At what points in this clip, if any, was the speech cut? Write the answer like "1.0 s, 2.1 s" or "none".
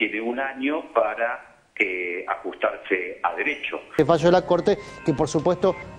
none